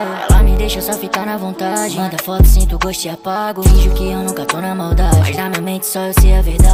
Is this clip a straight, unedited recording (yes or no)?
yes